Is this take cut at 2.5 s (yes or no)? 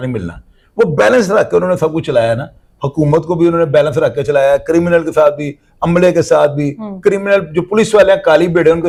no